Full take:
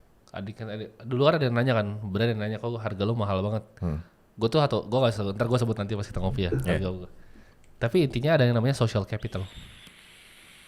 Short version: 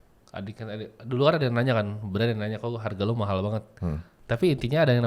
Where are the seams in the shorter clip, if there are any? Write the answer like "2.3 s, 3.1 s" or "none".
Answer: 4.1 s